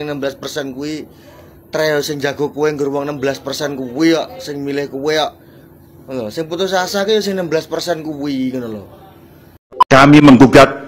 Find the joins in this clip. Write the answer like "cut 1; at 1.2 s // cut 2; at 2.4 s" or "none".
cut 1; at 9.9 s